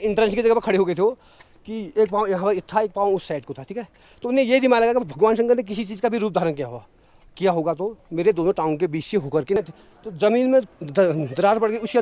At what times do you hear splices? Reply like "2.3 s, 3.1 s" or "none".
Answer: 9.6 s